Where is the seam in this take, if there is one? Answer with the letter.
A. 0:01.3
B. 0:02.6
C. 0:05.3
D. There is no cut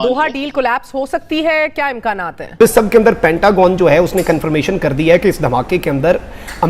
B